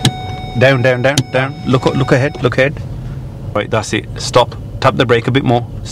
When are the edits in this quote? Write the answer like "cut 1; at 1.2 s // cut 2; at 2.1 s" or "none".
cut 1; at 3.6 s